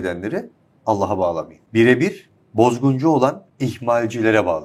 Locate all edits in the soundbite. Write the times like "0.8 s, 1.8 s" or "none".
1.6 s, 3.5 s

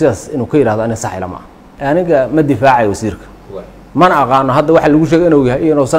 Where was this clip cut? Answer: 1.7 s

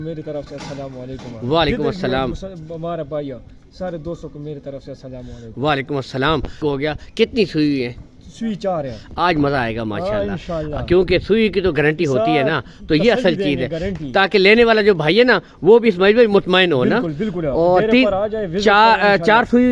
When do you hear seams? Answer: 6.6 s

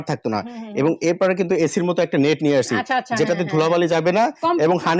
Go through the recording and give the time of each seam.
none

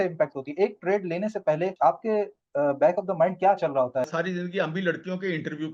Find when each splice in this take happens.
1.7 s, 4.1 s

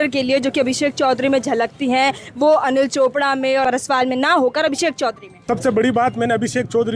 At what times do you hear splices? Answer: 3.6 s, 5.3 s

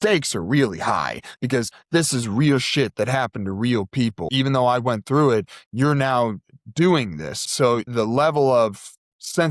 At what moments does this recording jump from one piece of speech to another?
4.3 s, 7.6 s

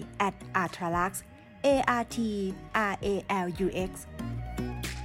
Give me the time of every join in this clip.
4.0 s

